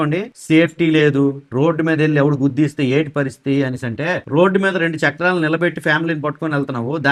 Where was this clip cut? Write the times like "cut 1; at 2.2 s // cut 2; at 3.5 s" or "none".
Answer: none